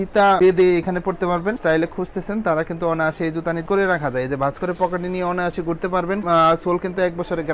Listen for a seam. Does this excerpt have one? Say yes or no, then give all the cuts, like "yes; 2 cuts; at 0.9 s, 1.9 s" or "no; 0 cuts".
yes; 2 cuts; at 1.6 s, 3.6 s